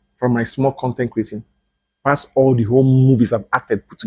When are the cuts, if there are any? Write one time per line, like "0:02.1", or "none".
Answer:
none